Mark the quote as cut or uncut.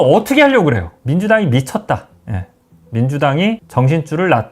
cut